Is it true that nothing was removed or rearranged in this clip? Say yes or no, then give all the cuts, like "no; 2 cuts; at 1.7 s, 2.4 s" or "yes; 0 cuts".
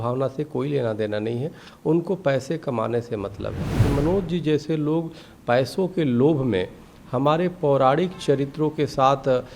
no; 1 cut; at 3.8 s